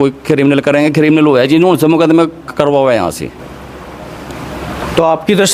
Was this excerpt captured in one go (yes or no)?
yes